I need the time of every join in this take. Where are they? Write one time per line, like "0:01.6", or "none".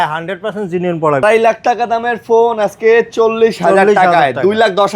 0:01.2